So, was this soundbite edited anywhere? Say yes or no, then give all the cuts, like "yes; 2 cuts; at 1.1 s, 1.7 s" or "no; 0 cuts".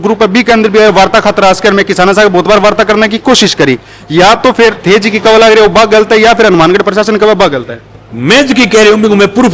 no; 0 cuts